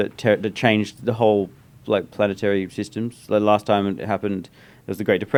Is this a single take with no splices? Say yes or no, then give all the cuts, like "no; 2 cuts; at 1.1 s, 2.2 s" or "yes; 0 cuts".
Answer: yes; 0 cuts